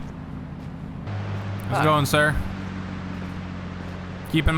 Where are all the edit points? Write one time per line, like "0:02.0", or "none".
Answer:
0:01.1